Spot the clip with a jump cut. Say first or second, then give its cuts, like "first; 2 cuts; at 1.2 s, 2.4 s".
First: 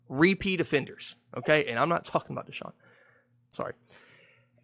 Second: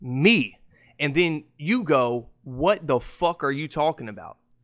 first; 1 cut; at 3.5 s